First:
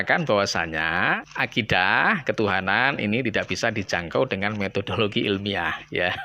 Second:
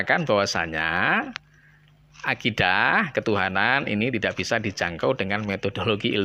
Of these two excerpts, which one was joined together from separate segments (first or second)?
first